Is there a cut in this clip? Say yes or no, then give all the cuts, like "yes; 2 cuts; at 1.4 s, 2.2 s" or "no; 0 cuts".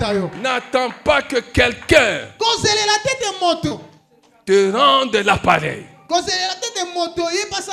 no; 0 cuts